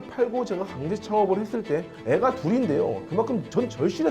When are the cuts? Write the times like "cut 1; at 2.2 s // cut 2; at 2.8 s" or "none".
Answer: cut 1; at 3.0 s